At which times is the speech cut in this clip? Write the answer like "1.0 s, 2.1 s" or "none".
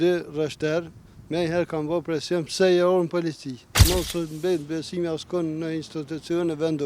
3.7 s